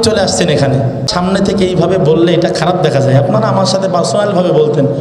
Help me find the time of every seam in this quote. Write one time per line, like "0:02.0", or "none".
0:01.1